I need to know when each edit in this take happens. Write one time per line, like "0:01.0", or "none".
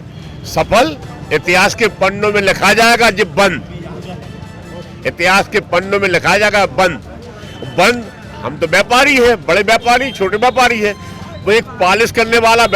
none